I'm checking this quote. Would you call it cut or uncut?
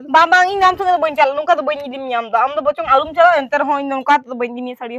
uncut